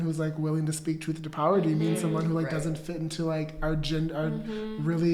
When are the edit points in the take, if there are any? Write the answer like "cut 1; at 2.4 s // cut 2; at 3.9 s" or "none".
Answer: none